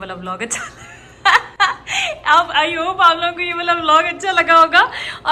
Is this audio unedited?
yes; 0 cuts

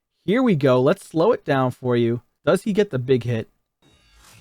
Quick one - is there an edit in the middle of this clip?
yes; 1 cut; at 2.3 s

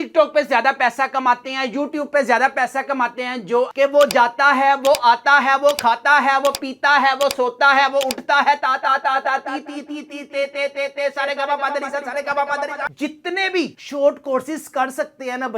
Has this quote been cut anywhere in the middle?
yes; 2 cuts; at 3.7 s, 12.9 s

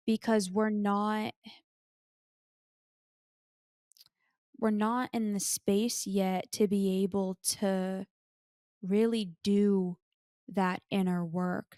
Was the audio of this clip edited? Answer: no; 0 cuts

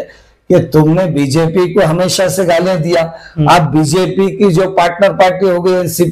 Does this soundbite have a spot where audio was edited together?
no; 0 cuts

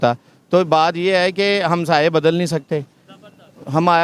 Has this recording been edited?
no; 0 cuts

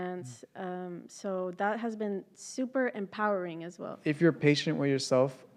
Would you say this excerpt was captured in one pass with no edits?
no; 1 cut; at 4.2 s

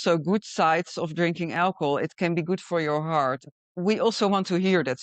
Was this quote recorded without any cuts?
no; 1 cut; at 3.5 s

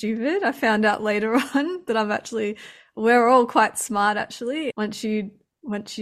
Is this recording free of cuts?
yes; 0 cuts

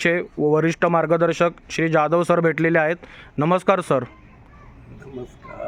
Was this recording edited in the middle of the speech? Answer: no; 0 cuts

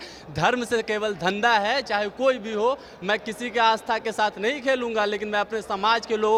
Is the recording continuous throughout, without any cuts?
yes; 0 cuts

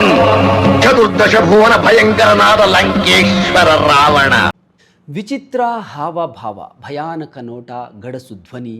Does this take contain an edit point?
no; 0 cuts

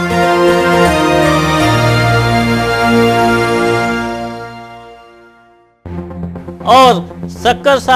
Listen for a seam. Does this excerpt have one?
no; 0 cuts

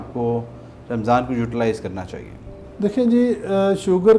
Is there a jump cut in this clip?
no; 0 cuts

